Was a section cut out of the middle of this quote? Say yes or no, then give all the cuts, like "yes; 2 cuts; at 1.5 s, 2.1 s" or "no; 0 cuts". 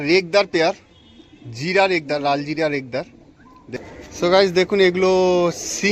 yes; 1 cut; at 3.7 s